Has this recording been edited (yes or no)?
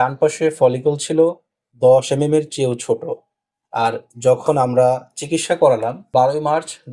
yes